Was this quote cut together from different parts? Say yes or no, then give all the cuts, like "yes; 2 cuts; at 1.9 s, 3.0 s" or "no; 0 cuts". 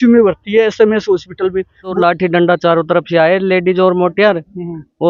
yes; 1 cut; at 1.9 s